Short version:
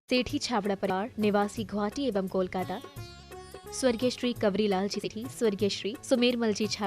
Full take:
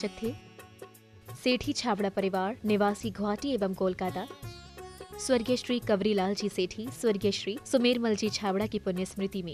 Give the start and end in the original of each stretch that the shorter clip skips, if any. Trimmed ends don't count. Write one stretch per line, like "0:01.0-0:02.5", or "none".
0:02.2-0:02.4
0:06.5-0:06.7

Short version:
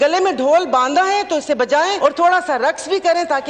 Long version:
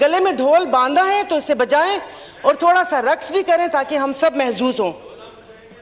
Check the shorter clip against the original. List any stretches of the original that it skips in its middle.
0:01.9-0:02.4

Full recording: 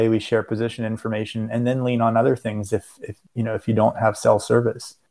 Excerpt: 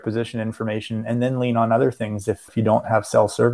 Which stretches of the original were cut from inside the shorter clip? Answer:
0:02.9-0:03.6

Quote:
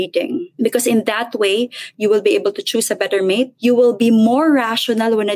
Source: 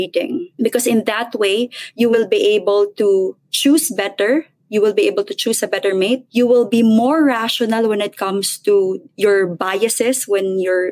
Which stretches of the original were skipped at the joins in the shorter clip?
0:01.8-0:04.5

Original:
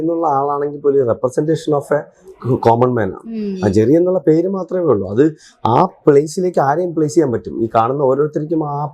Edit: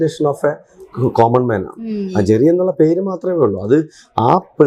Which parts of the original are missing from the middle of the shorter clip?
none

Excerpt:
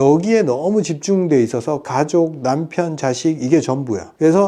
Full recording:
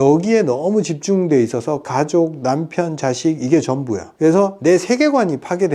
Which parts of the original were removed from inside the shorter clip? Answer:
none

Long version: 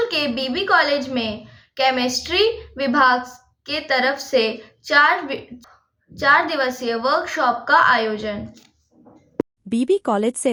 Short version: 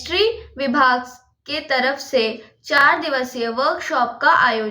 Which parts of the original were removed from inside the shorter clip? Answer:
0:05.0-0:06.3

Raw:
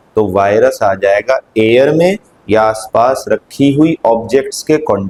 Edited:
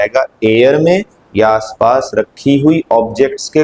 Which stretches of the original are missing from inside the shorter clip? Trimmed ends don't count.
none

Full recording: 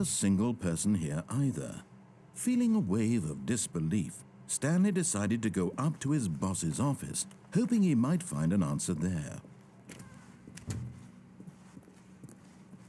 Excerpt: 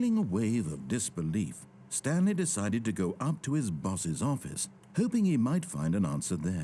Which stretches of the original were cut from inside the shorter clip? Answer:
none

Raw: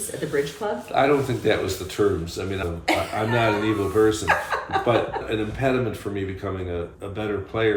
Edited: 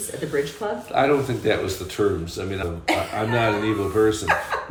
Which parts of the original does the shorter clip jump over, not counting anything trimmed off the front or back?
none

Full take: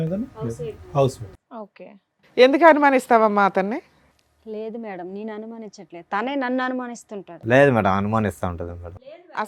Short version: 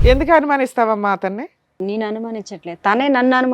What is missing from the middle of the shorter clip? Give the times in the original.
0:04.1-0:05.1

